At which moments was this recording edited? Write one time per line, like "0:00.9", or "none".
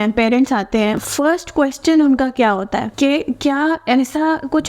0:01.0
0:02.9

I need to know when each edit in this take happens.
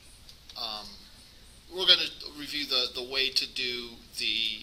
0:02.8

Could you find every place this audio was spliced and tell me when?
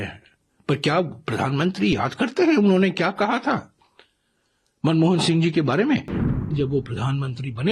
0:06.3

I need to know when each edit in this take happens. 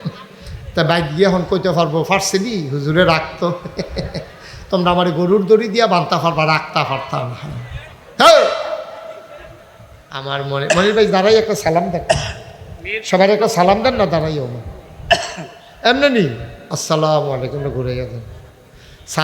0:10.1

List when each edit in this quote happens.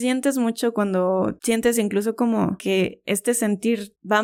none

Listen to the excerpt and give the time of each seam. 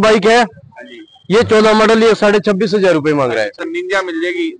0:03.6

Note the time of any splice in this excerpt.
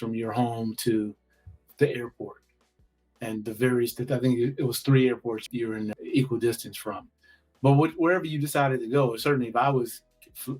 0:05.8

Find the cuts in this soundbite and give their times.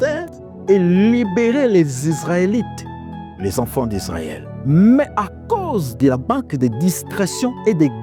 none

